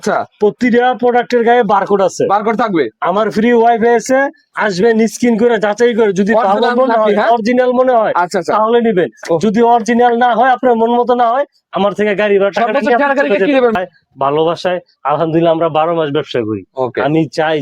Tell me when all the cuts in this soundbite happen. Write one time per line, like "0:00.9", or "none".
0:13.7